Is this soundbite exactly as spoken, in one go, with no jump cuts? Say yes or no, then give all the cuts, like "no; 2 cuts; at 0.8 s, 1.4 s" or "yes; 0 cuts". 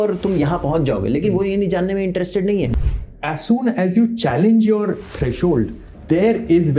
no; 2 cuts; at 2.8 s, 5.9 s